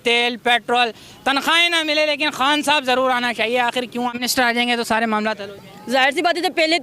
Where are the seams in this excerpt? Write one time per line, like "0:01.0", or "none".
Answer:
0:04.2